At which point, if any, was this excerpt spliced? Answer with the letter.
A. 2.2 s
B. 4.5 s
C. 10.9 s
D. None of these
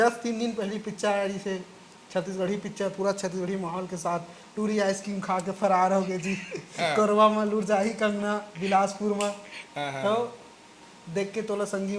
D